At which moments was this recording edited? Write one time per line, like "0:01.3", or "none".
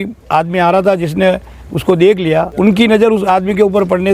0:02.5